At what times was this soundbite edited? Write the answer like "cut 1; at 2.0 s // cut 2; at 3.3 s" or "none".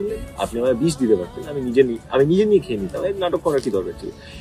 none